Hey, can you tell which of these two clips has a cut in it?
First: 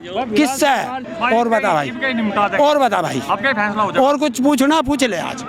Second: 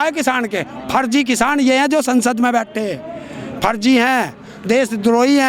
first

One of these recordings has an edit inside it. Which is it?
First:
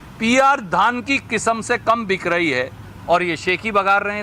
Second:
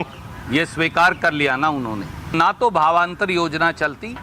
second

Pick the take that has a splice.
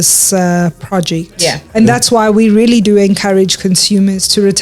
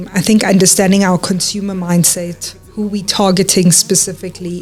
first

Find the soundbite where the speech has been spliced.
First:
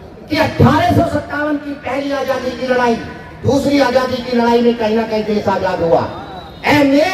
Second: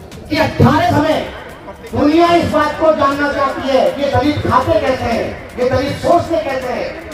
second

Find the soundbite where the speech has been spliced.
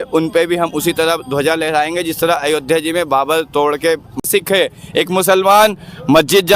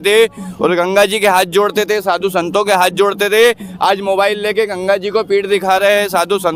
first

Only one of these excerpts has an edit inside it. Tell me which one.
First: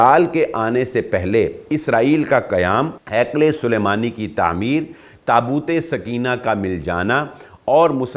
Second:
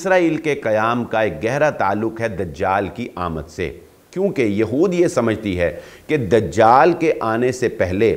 first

